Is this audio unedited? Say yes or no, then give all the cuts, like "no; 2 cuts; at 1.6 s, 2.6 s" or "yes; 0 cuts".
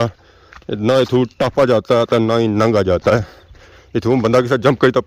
yes; 0 cuts